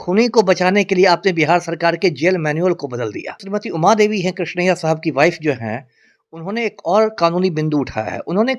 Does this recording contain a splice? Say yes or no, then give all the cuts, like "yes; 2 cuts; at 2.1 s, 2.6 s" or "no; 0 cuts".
yes; 1 cut; at 3.4 s